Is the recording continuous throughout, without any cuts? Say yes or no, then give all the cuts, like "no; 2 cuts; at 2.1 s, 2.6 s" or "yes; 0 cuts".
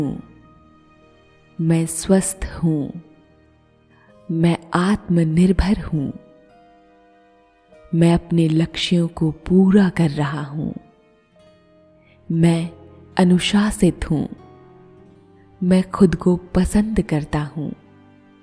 yes; 0 cuts